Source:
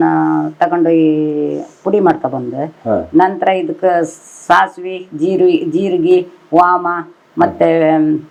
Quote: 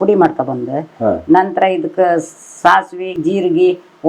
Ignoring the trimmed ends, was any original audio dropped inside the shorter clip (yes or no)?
yes